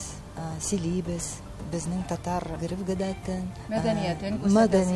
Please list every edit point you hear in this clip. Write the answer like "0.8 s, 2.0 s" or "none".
2.5 s, 3.6 s